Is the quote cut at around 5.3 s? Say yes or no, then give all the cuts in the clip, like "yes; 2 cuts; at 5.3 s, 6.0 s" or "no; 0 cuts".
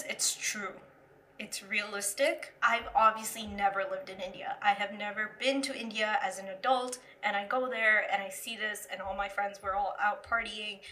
no; 1 cut; at 2.5 s